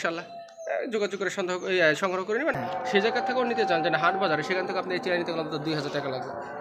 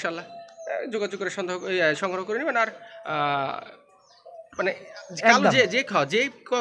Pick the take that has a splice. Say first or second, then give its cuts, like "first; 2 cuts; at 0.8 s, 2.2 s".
first; 1 cut; at 2.5 s